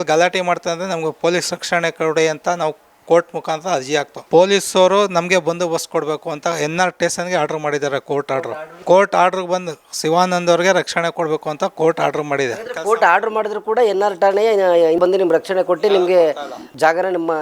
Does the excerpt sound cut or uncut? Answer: cut